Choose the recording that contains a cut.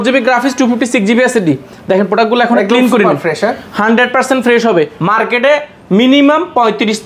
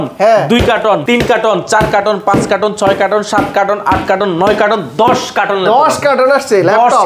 first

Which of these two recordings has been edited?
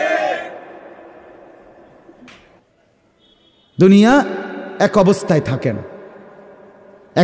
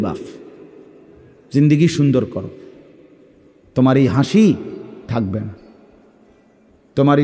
first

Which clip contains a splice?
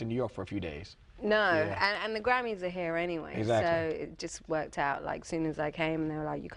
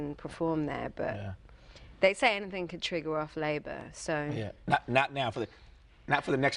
first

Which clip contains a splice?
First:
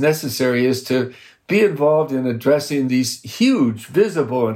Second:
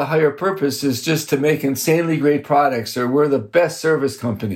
first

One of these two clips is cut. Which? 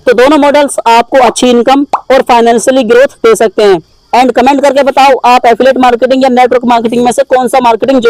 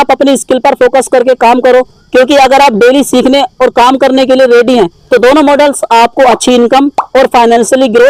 first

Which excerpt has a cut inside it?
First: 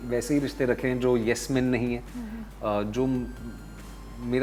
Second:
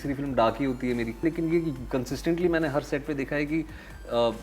second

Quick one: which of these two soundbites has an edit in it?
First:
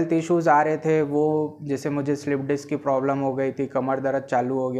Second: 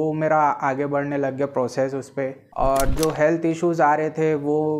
second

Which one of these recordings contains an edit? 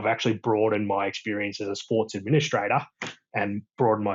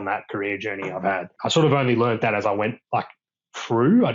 second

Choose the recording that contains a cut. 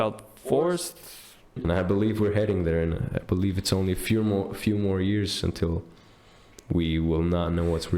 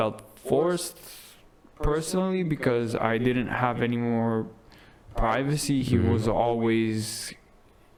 first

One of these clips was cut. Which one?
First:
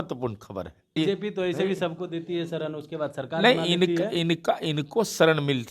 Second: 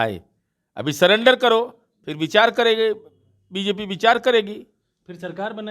first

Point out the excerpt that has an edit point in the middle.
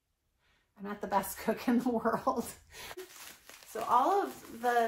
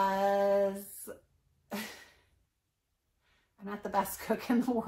first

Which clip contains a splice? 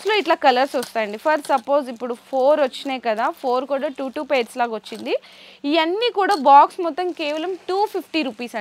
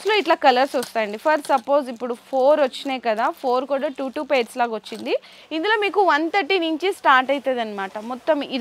second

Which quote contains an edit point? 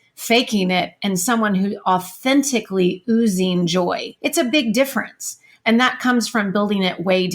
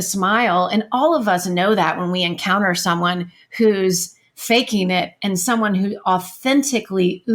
first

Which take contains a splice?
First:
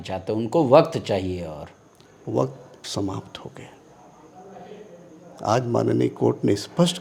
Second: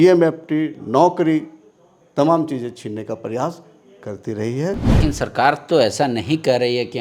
second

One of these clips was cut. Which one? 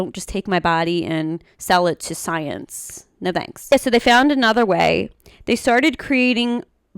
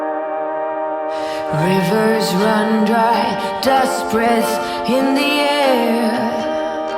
first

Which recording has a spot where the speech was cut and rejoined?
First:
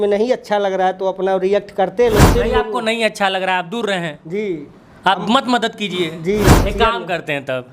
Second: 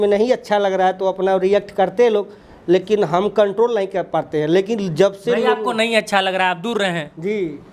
first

